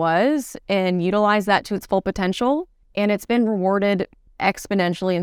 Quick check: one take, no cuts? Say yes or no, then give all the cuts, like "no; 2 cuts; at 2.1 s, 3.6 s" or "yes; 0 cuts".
no; 2 cuts; at 2.8 s, 4.2 s